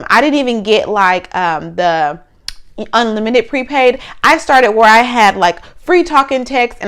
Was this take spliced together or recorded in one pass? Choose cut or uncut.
uncut